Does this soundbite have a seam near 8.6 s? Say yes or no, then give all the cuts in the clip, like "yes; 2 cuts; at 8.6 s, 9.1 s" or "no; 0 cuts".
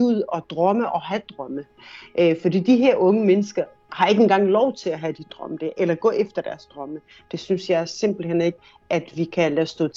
yes; 1 cut; at 8.6 s